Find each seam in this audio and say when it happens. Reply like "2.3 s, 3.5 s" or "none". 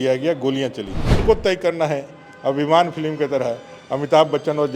1.2 s